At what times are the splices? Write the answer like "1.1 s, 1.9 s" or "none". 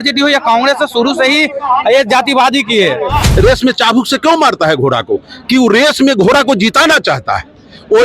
3.2 s